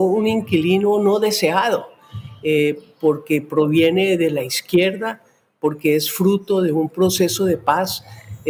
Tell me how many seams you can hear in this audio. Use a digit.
0